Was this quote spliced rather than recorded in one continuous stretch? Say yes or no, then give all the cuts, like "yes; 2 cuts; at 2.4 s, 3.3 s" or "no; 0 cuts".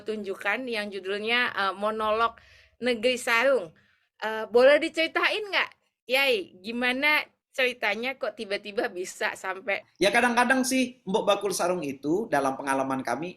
yes; 1 cut; at 9.8 s